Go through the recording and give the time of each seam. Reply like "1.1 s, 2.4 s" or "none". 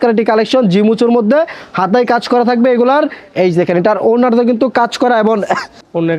none

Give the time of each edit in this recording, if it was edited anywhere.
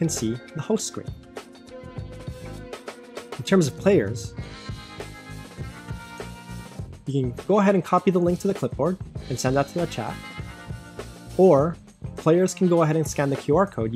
1.0 s, 3.4 s

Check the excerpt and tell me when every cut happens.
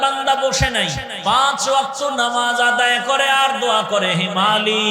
1.1 s

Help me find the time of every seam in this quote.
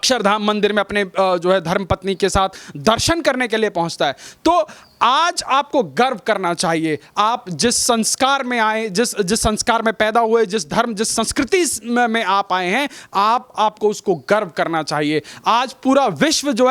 none

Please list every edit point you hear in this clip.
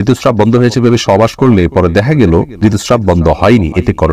2.5 s

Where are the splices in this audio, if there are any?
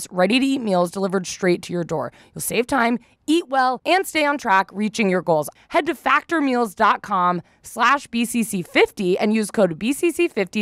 5.5 s

